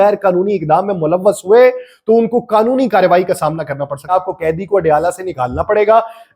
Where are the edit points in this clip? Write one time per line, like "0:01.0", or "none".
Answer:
0:04.1